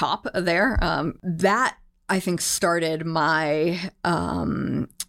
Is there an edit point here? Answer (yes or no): yes